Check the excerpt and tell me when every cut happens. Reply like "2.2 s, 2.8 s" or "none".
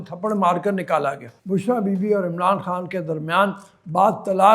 1.3 s